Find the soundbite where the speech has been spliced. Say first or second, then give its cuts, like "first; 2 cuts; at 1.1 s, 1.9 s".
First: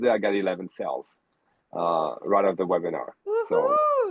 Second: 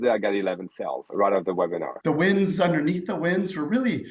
second; 2 cuts; at 1.1 s, 1.9 s